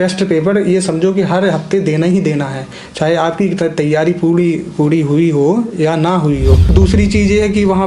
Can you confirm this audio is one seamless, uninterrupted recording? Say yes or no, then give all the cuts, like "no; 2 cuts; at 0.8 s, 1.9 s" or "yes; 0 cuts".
no; 1 cut; at 6.7 s